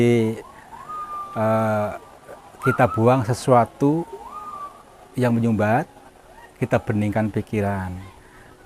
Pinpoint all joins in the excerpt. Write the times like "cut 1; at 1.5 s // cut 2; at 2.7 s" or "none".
none